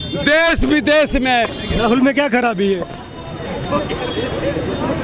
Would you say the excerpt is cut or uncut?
cut